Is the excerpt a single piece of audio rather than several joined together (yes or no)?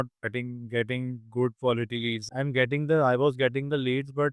no